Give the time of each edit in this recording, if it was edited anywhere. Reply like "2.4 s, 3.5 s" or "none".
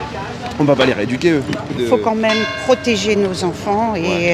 1.8 s